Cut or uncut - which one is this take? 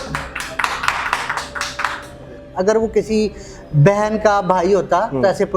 cut